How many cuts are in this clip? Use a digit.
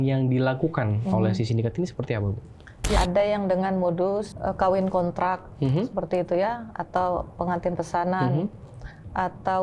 1